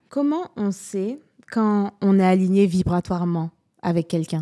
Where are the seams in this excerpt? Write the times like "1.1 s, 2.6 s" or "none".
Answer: none